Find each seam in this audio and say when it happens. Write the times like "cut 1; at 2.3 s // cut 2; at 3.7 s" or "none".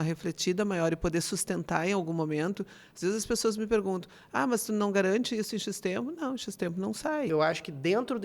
cut 1; at 7.3 s